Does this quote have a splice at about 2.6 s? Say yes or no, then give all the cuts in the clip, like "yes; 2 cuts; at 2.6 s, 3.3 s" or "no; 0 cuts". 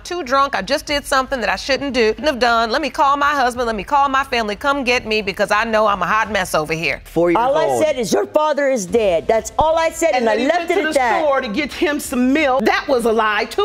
no; 2 cuts; at 7.0 s, 12.6 s